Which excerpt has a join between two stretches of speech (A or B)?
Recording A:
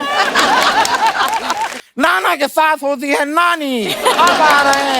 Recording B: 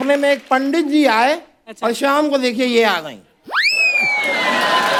A